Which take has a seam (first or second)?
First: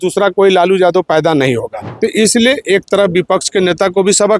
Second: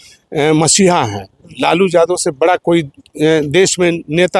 first